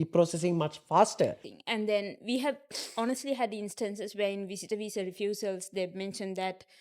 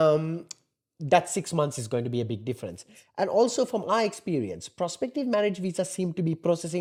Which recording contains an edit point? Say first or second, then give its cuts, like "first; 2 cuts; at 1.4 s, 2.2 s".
first; 1 cut; at 1.5 s